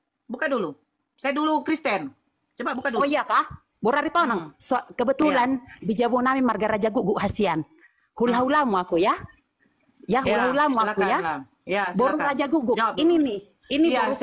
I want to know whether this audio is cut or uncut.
uncut